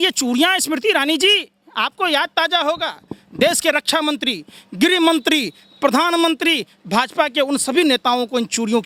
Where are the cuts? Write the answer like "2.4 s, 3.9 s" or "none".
none